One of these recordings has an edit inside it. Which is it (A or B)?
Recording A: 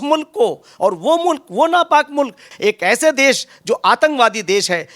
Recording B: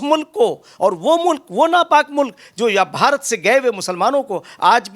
A